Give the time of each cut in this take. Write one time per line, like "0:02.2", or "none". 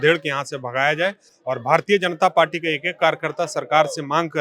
none